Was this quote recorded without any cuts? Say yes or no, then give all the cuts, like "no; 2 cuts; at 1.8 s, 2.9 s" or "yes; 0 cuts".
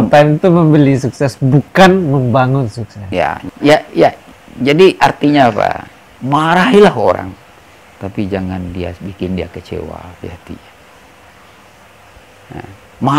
no; 1 cut; at 3.4 s